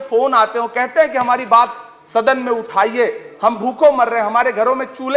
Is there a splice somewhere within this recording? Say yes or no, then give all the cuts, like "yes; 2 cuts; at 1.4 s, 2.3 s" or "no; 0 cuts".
no; 0 cuts